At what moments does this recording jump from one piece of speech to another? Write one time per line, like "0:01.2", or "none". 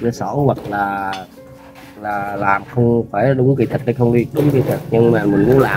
none